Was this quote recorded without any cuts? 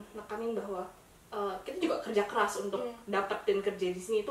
yes; 0 cuts

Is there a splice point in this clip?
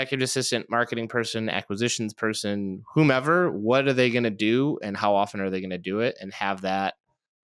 no; 0 cuts

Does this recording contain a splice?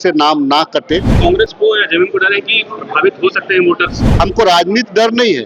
yes; 2 cuts; at 1.2 s, 4.0 s

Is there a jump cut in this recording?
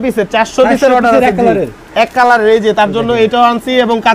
no; 0 cuts

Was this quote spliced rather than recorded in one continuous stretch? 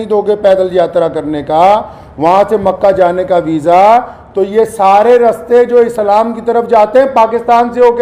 no; 0 cuts

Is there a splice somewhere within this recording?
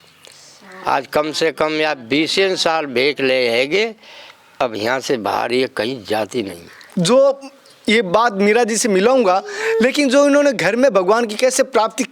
yes; 1 cut; at 6.9 s

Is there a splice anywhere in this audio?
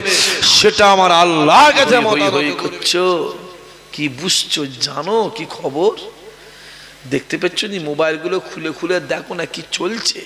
yes; 1 cut; at 2.1 s

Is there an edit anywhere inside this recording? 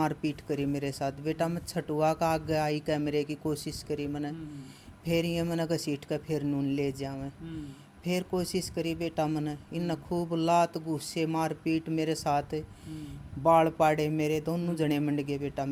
no; 0 cuts

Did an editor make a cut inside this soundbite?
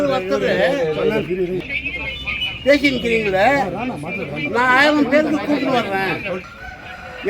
yes; 2 cuts; at 1.7 s, 6.4 s

